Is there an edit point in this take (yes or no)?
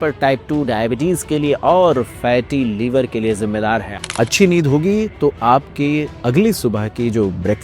yes